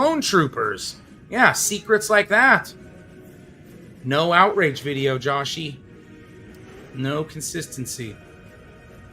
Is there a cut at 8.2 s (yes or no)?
yes